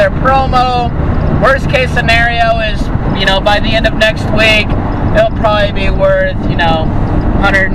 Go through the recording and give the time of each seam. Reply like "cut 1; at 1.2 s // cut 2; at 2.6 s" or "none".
none